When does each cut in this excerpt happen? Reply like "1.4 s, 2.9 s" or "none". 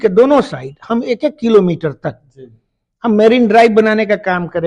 none